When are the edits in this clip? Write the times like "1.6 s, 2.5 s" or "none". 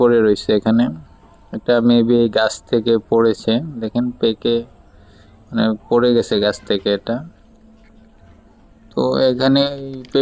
none